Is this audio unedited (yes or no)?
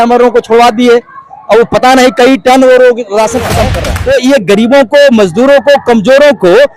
no